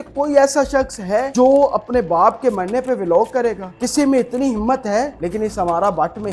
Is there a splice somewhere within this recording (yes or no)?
yes